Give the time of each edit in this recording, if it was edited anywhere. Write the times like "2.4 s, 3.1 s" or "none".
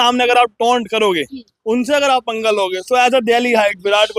none

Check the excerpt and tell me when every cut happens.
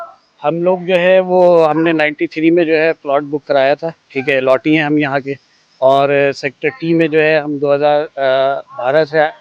none

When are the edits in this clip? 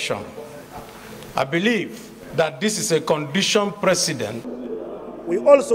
4.5 s

